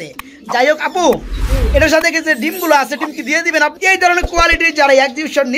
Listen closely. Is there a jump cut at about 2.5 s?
no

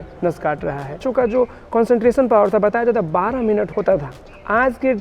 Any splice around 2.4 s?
no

